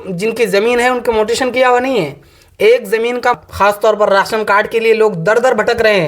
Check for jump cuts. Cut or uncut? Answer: cut